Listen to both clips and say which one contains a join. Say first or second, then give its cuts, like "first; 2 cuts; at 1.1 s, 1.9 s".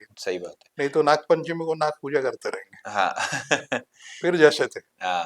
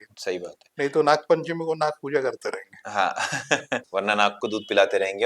second; 1 cut; at 3.9 s